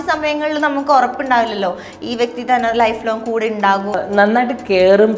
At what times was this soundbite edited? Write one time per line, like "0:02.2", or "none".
0:04.0